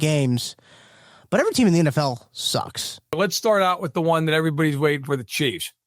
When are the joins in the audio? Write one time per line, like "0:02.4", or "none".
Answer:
0:03.2